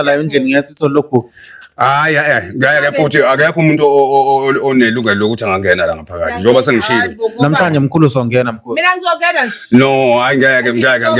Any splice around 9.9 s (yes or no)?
no